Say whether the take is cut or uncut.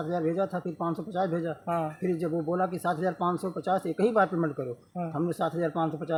uncut